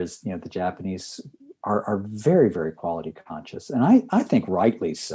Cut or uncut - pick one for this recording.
uncut